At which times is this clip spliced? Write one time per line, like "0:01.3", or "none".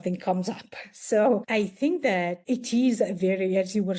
0:01.4
0:02.4